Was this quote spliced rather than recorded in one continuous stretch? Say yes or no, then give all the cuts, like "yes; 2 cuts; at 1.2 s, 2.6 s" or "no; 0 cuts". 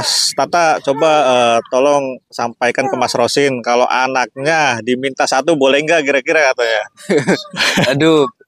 no; 0 cuts